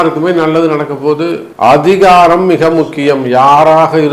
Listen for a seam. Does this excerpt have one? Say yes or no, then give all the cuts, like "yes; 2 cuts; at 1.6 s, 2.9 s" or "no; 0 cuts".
yes; 1 cut; at 1.4 s